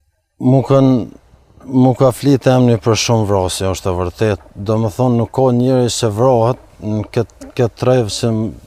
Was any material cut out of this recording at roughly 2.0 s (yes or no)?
no